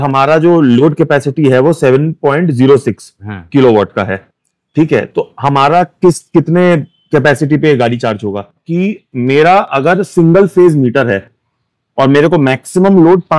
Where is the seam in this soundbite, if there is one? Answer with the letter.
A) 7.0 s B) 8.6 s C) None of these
B